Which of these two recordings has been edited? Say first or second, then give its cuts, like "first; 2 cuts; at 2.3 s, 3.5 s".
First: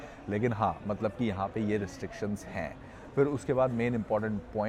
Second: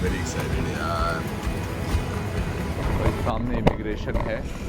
second; 1 cut; at 2.8 s